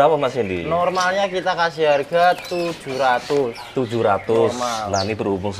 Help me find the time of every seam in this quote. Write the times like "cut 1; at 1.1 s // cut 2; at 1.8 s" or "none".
none